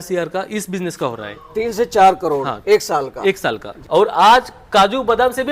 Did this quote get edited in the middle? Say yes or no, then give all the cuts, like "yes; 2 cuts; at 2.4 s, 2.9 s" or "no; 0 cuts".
yes; 1 cut; at 3.7 s